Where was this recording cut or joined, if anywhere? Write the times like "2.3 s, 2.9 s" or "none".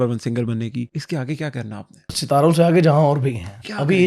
1.0 s, 2.1 s